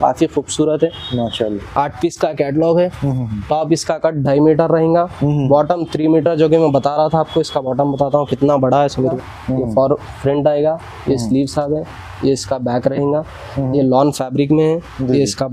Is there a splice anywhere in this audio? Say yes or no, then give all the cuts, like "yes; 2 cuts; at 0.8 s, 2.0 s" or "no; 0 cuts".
yes; 1 cut; at 9.0 s